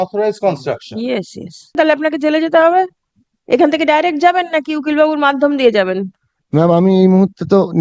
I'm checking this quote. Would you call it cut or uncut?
cut